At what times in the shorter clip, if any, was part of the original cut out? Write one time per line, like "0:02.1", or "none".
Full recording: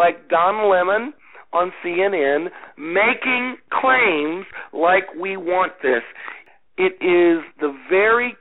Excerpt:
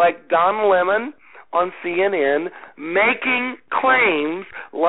none